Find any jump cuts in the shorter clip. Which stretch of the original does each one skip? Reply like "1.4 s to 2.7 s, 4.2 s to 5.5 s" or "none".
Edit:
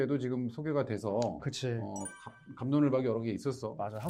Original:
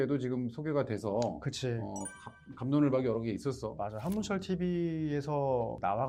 none